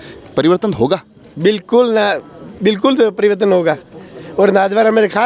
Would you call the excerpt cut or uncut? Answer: uncut